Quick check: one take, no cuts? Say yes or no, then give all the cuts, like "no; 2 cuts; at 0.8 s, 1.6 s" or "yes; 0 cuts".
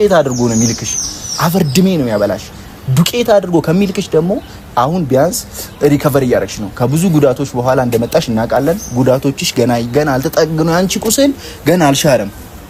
yes; 0 cuts